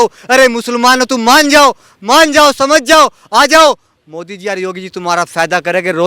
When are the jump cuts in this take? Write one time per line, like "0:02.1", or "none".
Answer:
none